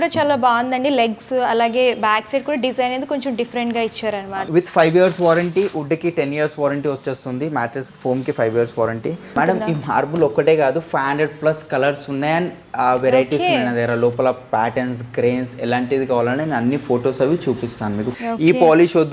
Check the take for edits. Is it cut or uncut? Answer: cut